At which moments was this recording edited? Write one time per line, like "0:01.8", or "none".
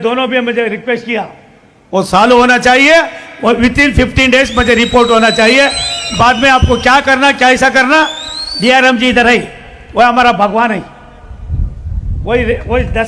none